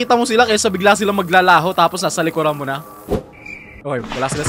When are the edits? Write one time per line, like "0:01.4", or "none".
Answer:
none